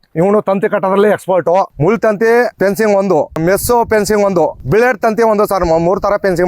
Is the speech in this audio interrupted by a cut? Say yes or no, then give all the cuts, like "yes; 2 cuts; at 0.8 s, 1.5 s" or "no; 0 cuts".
yes; 3 cuts; at 1.7 s, 2.5 s, 4.6 s